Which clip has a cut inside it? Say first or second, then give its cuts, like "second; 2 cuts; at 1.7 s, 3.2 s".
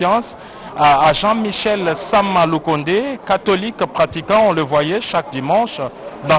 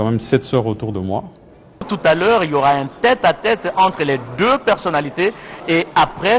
second; 1 cut; at 1.9 s